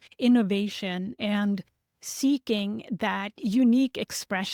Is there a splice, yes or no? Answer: no